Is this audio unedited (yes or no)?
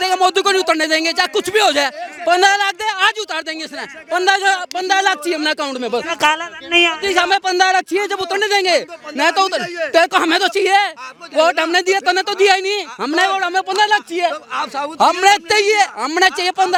yes